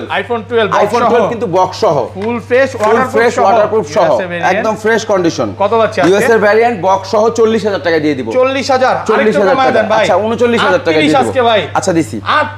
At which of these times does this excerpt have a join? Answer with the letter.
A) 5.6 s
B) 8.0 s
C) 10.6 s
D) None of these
D